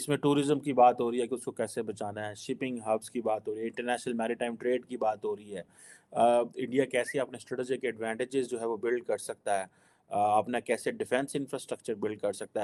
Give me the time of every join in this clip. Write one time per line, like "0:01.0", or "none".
none